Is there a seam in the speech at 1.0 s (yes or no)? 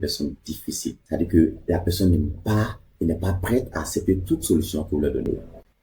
yes